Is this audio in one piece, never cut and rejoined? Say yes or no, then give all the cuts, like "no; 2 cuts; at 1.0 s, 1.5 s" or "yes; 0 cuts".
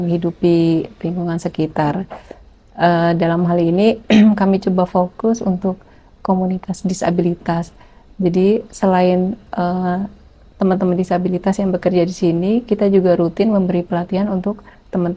yes; 0 cuts